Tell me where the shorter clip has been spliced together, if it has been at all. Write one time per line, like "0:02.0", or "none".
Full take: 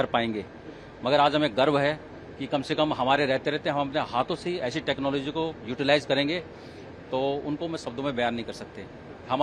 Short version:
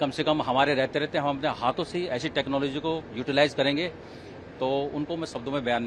none